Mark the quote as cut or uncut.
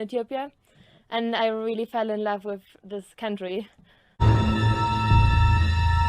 cut